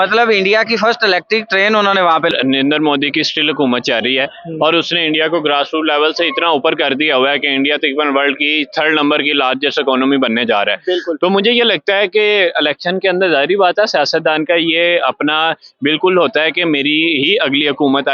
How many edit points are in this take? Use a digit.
1